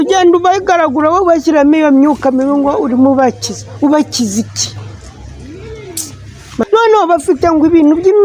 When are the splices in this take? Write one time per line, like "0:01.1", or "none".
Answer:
0:06.6